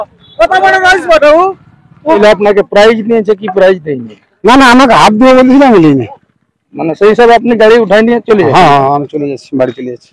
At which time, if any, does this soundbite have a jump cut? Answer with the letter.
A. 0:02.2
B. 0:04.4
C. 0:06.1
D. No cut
A